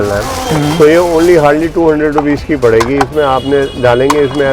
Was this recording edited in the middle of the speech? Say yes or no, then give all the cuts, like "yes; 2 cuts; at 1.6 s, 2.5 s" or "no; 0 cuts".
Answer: no; 0 cuts